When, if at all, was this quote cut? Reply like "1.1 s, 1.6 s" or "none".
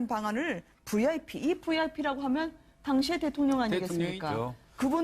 2.5 s